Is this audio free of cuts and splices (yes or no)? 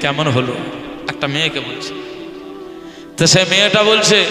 no